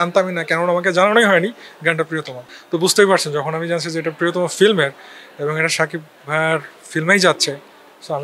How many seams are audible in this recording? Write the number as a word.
zero